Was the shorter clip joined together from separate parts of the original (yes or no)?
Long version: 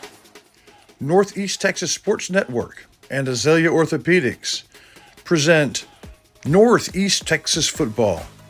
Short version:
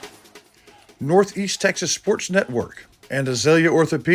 no